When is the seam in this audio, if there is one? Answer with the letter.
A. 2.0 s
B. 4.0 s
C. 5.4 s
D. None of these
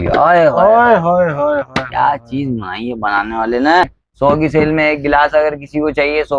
B